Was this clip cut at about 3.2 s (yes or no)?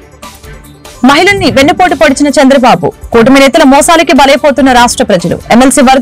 no